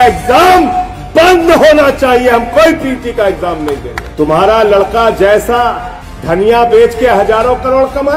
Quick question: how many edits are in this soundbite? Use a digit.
1